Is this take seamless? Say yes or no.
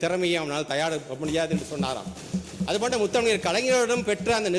yes